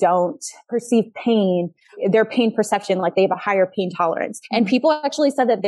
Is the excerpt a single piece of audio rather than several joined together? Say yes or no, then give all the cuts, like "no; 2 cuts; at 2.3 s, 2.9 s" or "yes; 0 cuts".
no; 1 cut; at 4.4 s